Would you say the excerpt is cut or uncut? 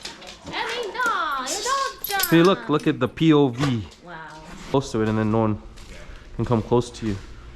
cut